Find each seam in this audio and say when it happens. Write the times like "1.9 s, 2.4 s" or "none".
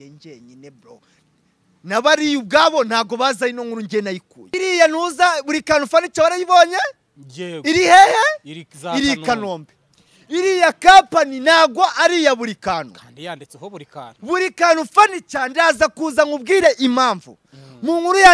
4.5 s